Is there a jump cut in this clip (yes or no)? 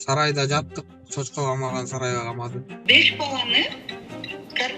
yes